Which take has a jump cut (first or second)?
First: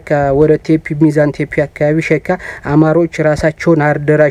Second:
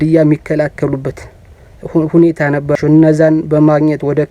second